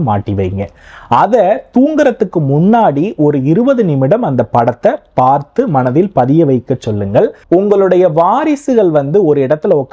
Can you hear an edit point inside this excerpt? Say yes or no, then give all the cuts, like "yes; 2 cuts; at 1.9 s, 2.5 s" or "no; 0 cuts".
yes; 1 cut; at 7.4 s